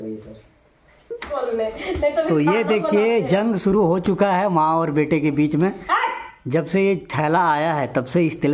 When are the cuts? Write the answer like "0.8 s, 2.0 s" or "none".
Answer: 1.2 s